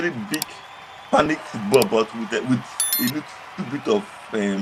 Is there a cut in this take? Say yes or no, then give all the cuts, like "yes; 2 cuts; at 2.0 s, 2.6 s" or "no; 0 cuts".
no; 0 cuts